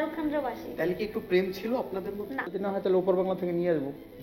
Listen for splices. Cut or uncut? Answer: cut